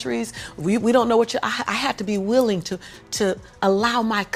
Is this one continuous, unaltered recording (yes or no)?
yes